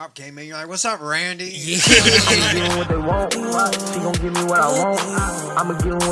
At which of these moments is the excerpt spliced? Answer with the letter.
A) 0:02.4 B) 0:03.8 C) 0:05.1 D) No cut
A